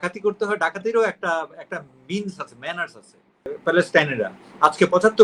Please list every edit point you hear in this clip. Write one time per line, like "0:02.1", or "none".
0:03.5